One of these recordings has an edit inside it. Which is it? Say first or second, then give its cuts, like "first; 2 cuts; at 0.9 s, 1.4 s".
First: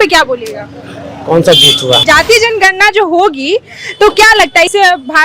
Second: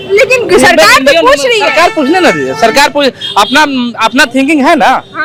first; 1 cut; at 2.0 s